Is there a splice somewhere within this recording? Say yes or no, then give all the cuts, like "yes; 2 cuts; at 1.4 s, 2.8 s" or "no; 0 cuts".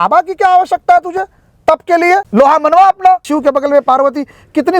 yes; 2 cuts; at 2.3 s, 3.2 s